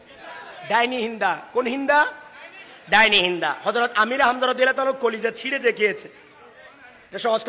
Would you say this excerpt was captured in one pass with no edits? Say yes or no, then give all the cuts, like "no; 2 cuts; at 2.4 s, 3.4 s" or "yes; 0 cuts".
yes; 0 cuts